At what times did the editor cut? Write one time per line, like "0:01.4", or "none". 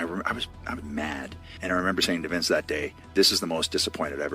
0:01.4